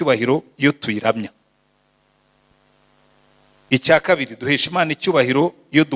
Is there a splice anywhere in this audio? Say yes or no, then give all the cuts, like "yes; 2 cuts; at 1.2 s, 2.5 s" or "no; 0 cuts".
no; 0 cuts